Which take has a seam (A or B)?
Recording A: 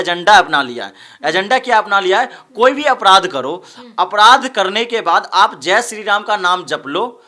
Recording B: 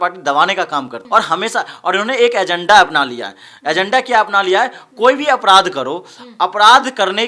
B